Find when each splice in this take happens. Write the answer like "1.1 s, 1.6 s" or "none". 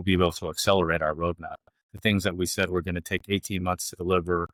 none